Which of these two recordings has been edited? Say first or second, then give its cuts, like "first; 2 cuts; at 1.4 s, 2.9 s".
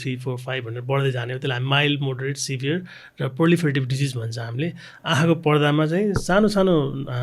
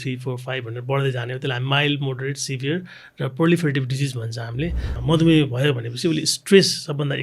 second; 1 cut; at 4.9 s